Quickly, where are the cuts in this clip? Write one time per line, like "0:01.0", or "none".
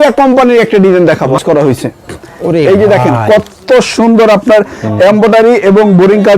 0:01.4

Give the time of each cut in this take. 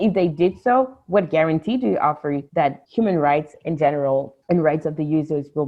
0:02.7
0:04.3

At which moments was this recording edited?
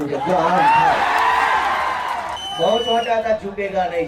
0:02.4

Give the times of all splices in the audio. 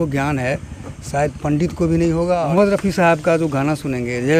0:02.5

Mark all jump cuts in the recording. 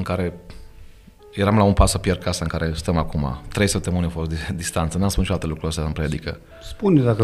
none

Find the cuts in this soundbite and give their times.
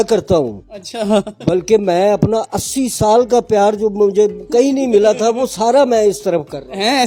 none

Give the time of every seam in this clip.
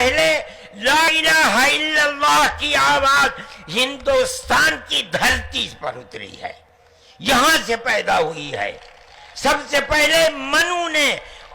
0:01.1

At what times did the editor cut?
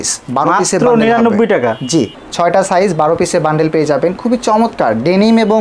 0:02.2

